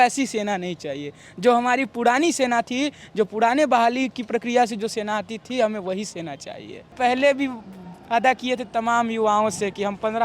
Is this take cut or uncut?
cut